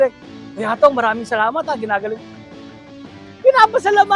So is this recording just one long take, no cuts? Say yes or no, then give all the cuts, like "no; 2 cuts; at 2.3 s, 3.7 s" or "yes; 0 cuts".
yes; 0 cuts